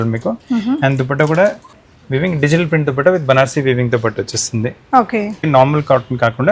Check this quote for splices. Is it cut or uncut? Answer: cut